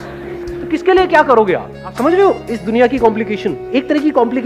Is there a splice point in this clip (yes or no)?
yes